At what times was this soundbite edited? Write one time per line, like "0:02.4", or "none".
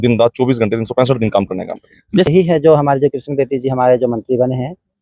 0:02.3